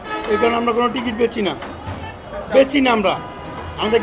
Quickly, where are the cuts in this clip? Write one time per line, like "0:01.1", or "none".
none